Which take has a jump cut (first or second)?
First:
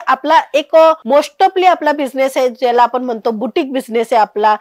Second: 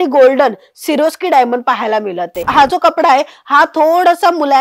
second